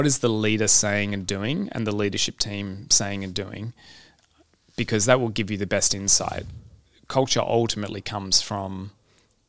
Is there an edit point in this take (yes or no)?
no